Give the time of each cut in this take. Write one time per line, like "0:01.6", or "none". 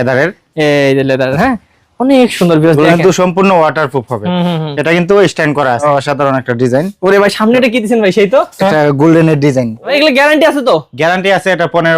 0:05.8
0:09.9